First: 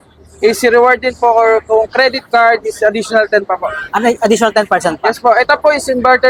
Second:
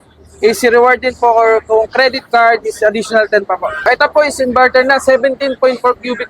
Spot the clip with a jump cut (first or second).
second